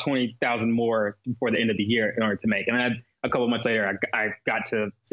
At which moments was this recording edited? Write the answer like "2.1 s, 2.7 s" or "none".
none